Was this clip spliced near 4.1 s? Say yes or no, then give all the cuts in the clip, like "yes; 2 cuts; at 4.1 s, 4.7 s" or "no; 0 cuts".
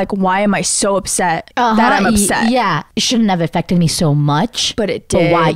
no; 2 cuts; at 1.5 s, 2.9 s